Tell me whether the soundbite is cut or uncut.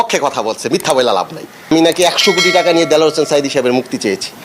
cut